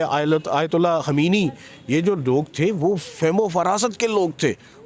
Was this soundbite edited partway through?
no; 0 cuts

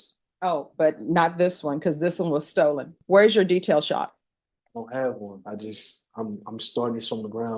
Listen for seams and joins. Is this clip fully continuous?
no; 1 cut; at 3.0 s

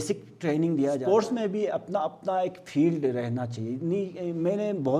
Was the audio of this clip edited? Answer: yes; 1 cut; at 1.0 s

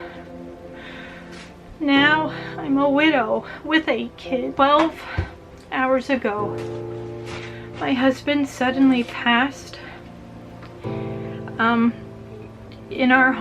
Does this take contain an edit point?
yes; 1 cut; at 4.5 s

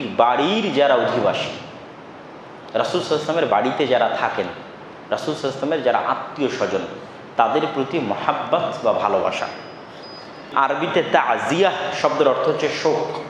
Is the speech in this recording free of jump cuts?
no; 1 cut; at 10.5 s

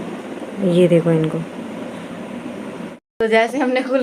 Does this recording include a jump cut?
yes; 1 cut; at 3.0 s

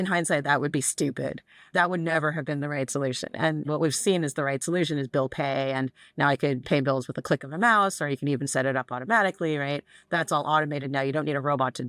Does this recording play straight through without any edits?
no; 3 cuts; at 1.5 s, 3.6 s, 6.6 s

